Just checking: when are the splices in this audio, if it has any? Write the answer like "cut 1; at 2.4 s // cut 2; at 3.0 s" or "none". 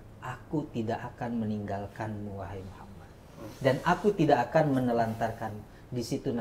none